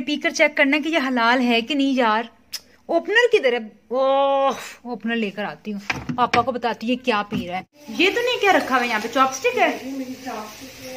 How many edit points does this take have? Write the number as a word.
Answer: zero